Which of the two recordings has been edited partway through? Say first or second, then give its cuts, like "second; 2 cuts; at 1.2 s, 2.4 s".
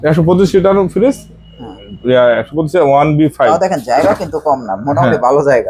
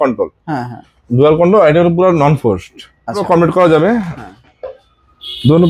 second; 1 cut; at 3.2 s